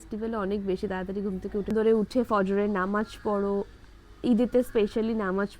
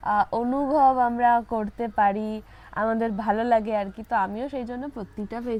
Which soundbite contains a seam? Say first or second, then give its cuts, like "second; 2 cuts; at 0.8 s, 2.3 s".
first; 1 cut; at 1.7 s